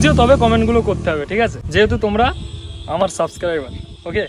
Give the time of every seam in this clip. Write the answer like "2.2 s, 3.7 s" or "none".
1.6 s